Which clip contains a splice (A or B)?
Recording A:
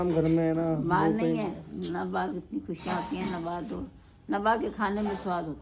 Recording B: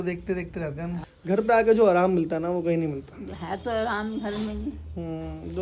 B